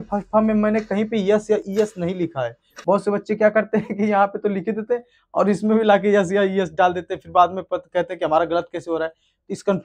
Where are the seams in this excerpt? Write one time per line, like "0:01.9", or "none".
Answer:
none

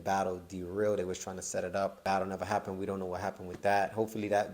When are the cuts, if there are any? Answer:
0:02.0

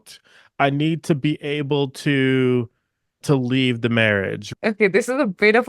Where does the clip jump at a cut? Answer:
0:03.2
0:04.4

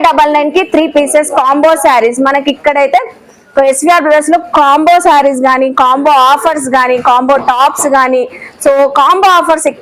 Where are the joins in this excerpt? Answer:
none

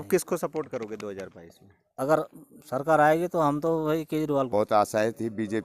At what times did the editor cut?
0:04.5

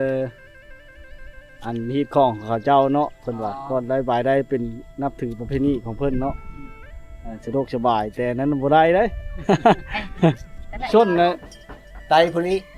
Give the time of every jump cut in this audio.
0:10.9

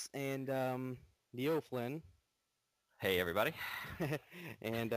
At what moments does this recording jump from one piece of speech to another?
none

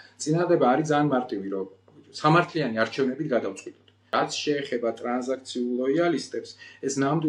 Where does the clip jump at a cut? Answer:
0:04.1

